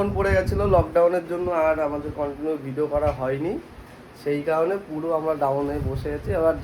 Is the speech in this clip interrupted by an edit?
no; 0 cuts

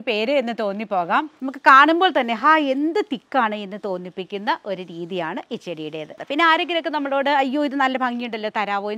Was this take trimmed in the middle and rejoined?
yes; 2 cuts; at 1.4 s, 6.2 s

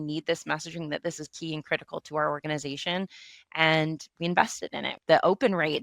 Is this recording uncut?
no; 1 cut; at 4.9 s

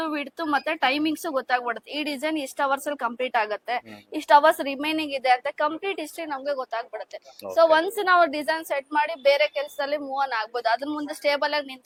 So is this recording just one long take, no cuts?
yes; 0 cuts

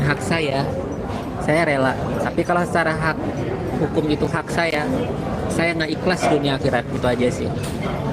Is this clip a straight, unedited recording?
yes; 0 cuts

